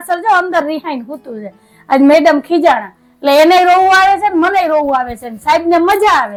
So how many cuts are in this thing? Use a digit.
0